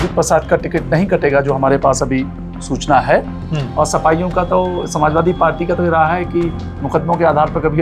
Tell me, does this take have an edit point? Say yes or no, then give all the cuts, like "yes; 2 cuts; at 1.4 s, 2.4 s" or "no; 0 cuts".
no; 0 cuts